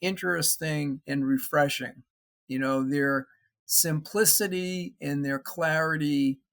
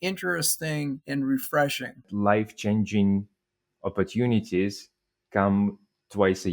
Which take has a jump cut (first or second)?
second